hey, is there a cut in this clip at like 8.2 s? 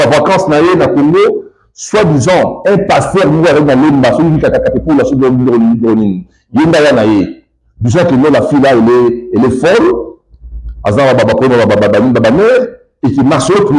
yes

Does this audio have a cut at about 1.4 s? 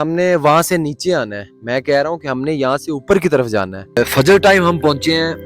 no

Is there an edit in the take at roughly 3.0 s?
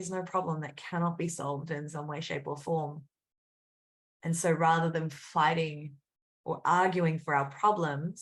no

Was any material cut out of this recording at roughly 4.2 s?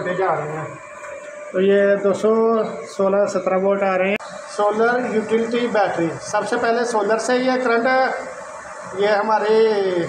yes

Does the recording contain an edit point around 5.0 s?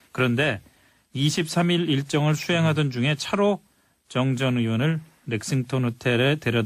no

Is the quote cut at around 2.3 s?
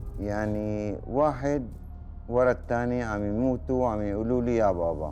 no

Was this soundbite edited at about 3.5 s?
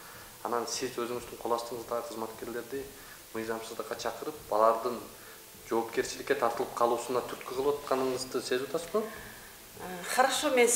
no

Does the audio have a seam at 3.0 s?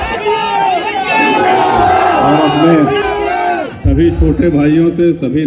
yes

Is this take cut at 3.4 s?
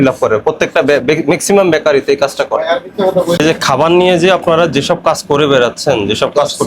yes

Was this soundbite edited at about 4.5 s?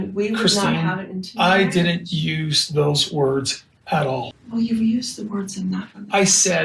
no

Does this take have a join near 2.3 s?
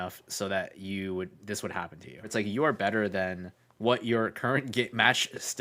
yes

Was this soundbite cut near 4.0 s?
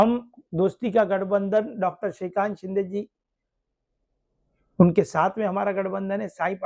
no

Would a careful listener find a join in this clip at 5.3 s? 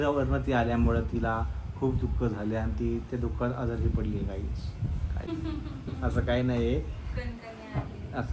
no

